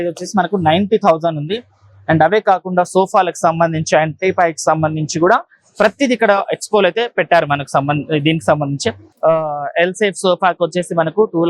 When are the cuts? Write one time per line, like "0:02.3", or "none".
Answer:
0:09.1